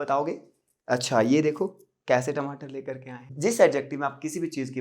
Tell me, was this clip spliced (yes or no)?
yes